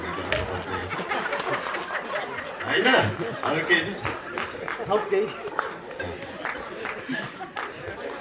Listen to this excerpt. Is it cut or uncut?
uncut